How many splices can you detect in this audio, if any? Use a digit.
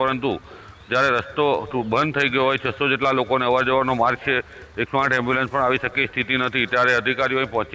0